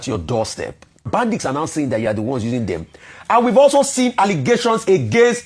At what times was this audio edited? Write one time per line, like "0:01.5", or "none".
0:01.1